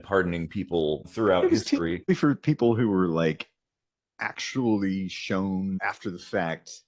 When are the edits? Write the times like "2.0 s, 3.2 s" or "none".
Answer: 1.1 s, 2.1 s, 5.8 s